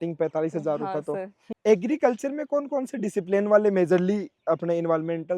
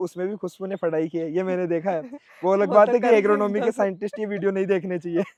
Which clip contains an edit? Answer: first; 1 cut; at 1.5 s

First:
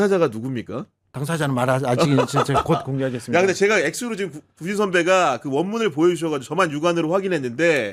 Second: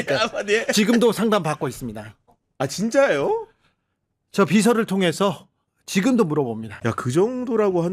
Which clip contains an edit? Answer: second; 1 cut; at 6.7 s

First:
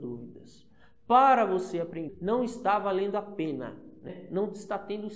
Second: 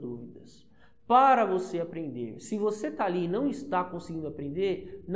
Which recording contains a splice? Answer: first; 2 cuts; at 2.1 s, 4.1 s

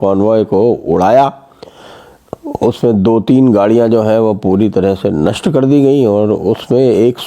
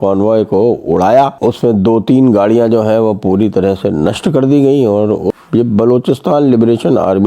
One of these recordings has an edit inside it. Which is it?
second; 2 cuts; at 1.4 s, 5.3 s

